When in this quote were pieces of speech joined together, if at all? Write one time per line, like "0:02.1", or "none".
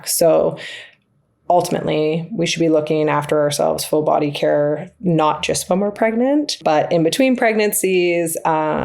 0:06.6